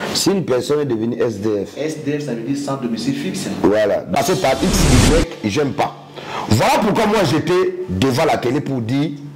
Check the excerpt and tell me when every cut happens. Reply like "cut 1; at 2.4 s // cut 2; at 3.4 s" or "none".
cut 1; at 4.1 s